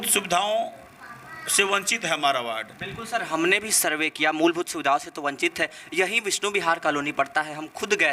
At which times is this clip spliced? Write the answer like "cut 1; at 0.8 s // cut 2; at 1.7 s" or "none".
none

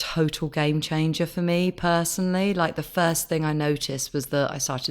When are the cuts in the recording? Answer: none

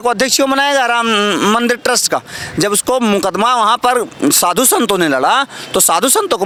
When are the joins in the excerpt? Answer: none

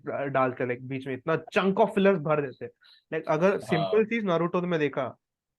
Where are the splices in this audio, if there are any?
none

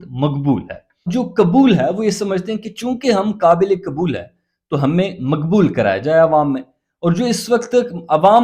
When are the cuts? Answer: cut 1; at 1.1 s

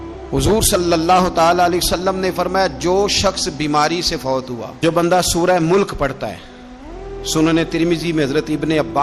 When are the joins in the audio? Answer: cut 1; at 4.7 s

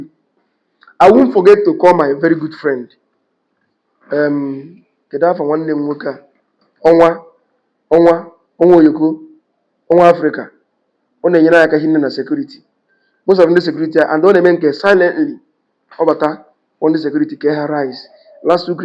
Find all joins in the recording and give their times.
none

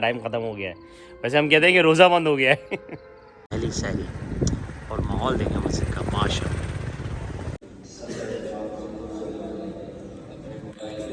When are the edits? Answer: cut 1; at 3.5 s // cut 2; at 7.6 s

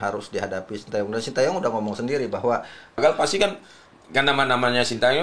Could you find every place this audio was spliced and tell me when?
cut 1; at 3.0 s

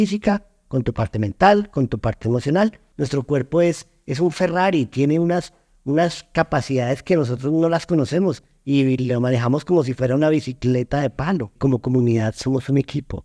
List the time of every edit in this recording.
cut 1; at 2.8 s // cut 2; at 11.6 s

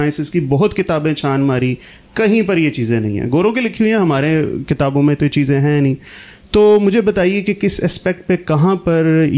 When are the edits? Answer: none

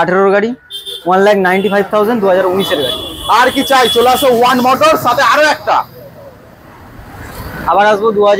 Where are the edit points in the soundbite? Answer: none

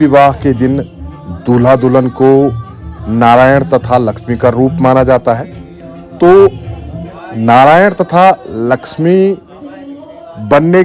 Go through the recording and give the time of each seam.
none

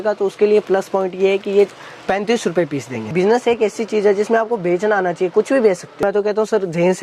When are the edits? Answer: cut 1; at 3.0 s // cut 2; at 6.0 s

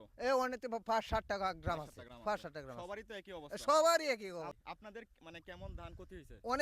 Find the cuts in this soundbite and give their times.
cut 1; at 4.6 s

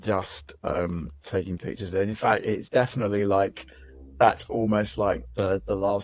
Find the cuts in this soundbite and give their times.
none

